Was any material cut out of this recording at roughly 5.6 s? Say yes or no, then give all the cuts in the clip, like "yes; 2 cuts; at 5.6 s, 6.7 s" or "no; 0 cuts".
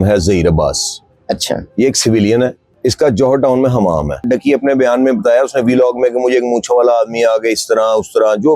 no; 2 cuts; at 2.7 s, 4.2 s